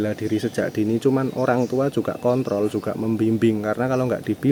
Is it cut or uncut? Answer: uncut